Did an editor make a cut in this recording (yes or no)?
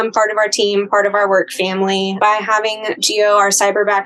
yes